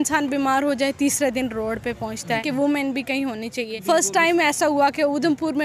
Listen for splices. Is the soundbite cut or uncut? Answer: cut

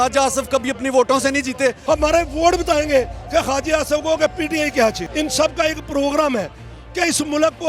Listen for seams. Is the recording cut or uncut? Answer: cut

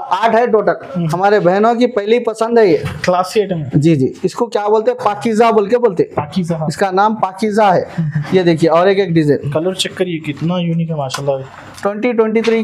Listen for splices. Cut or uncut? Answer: cut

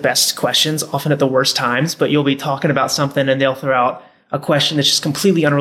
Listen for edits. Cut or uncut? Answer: uncut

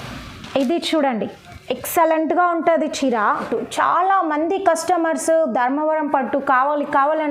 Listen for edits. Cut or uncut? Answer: cut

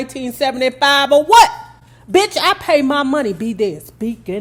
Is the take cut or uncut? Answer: uncut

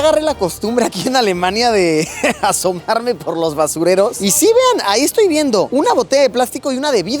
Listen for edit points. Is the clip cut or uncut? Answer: uncut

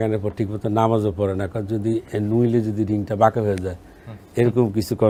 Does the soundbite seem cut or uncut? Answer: uncut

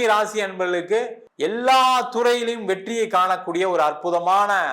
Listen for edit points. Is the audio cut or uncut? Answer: cut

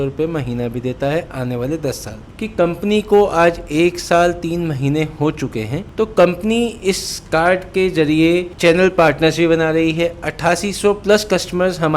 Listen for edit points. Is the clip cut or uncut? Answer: uncut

